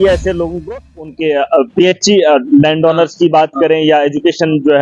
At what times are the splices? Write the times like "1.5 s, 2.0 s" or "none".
1.0 s